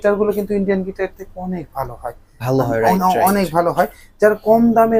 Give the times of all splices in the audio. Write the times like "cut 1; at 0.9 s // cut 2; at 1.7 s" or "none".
none